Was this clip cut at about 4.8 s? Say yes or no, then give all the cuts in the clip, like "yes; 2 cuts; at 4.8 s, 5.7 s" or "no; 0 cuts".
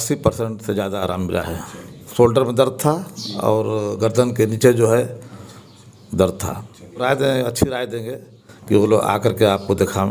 no; 2 cuts; at 2.0 s, 7.0 s